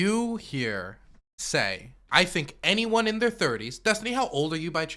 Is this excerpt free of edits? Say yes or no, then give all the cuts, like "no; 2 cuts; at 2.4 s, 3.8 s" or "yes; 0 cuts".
no; 1 cut; at 1.9 s